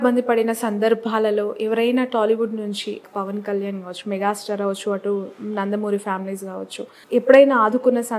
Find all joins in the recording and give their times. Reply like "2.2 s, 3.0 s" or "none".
3.0 s, 7.0 s